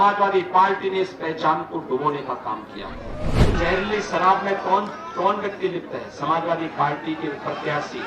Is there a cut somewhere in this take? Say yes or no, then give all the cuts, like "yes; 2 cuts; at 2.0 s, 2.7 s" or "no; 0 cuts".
yes; 1 cut; at 3.5 s